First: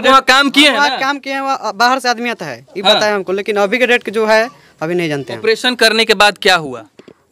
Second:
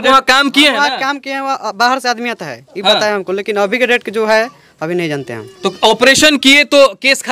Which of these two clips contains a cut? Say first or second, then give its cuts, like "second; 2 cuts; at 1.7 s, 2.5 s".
first; 1 cut; at 5.4 s